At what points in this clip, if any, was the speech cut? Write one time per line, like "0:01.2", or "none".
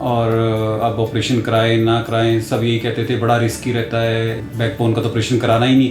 0:04.4